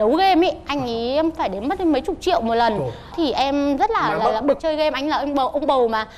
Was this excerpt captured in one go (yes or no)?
no